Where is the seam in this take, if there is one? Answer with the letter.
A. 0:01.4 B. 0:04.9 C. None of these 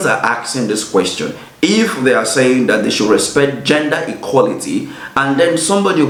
C